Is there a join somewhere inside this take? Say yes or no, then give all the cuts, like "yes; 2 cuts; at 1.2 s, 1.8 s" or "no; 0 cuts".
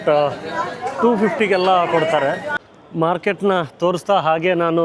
yes; 1 cut; at 2.5 s